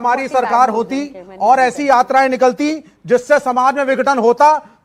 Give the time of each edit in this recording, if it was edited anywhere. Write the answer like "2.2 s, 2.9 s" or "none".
none

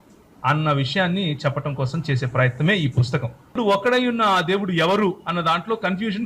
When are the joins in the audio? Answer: 3.6 s

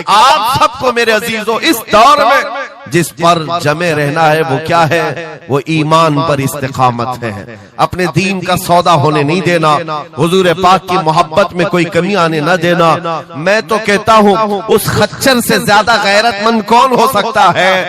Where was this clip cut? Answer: none

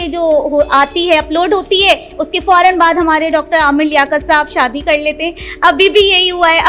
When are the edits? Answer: none

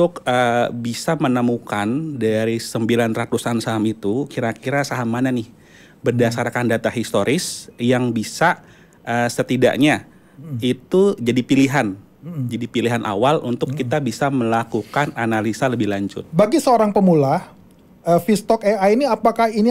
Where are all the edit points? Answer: 16.1 s

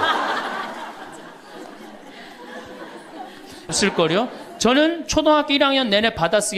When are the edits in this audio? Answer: 3.7 s

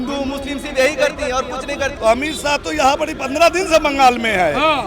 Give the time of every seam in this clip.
1.9 s

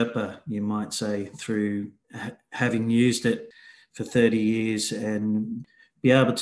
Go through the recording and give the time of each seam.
3.5 s, 5.6 s

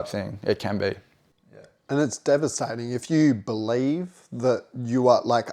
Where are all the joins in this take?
none

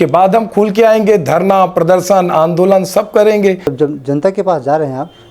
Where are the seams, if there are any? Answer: 3.7 s

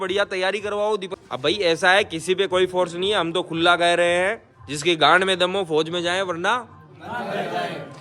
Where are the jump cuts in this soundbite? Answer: 1.1 s

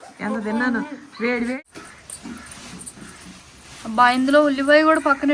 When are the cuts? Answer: 1.6 s

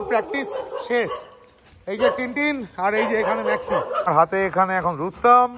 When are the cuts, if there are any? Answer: 4.0 s

